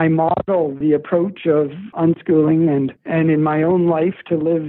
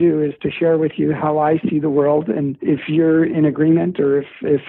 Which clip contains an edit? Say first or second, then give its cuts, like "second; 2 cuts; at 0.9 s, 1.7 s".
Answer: first; 2 cuts; at 0.8 s, 1.9 s